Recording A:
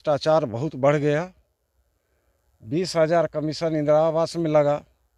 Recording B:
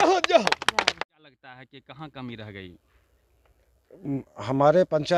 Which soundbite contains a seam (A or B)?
B